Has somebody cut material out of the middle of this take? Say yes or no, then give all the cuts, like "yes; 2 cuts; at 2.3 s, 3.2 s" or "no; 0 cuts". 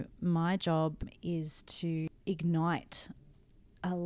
yes; 2 cuts; at 1.1 s, 2.1 s